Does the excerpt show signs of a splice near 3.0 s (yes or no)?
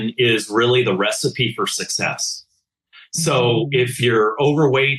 no